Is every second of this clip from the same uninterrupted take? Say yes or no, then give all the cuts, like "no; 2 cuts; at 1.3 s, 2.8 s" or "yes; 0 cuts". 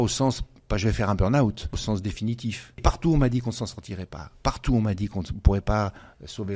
no; 2 cuts; at 1.7 s, 2.8 s